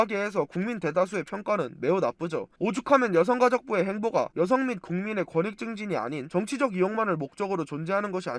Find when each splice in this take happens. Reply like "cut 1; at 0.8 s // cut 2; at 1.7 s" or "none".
none